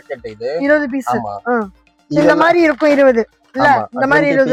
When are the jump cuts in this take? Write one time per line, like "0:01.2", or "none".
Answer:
none